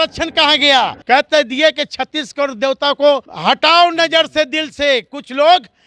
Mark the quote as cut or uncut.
cut